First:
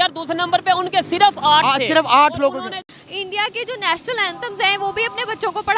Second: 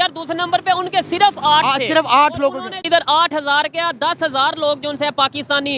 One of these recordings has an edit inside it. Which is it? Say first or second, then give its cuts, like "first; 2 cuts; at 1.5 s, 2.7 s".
first; 1 cut; at 2.7 s